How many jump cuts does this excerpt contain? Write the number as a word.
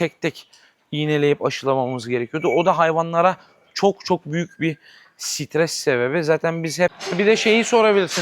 one